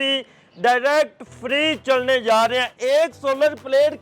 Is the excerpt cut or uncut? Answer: uncut